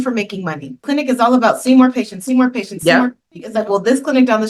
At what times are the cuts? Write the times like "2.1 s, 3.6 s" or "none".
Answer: 0.8 s, 3.4 s